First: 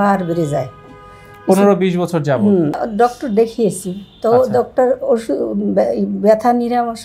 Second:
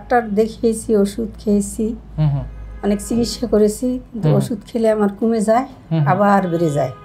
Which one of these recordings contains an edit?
first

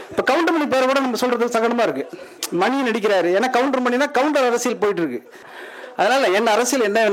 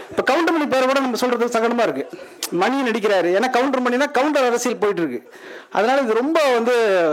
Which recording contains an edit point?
first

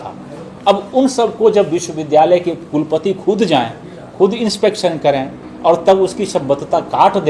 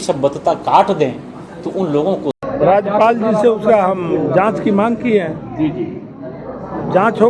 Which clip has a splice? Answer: second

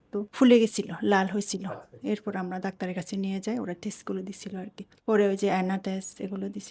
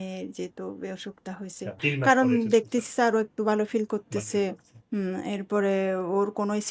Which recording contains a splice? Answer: second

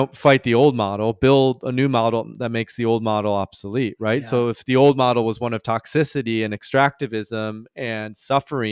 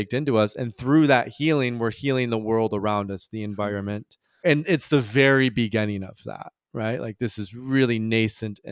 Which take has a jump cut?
second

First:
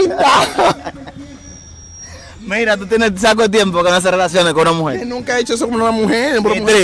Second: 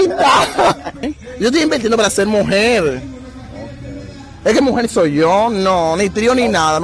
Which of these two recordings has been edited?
second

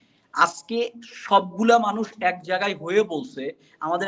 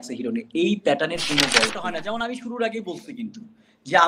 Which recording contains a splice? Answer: second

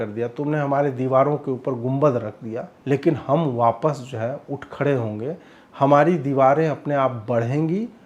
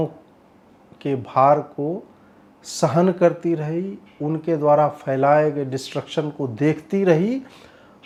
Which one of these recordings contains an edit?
first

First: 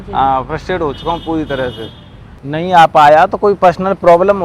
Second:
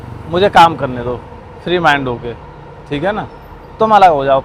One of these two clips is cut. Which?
first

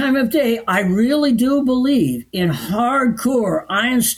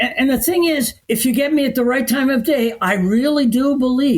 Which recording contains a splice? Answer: second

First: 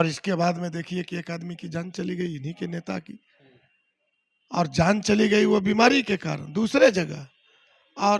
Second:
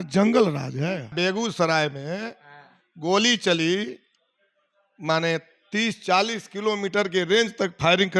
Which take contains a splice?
second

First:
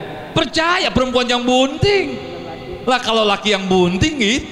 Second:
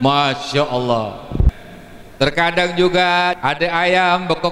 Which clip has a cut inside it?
second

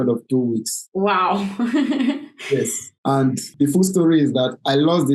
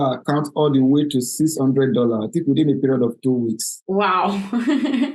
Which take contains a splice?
first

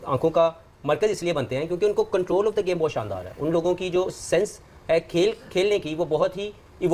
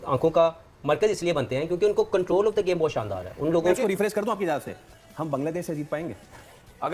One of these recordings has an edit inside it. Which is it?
second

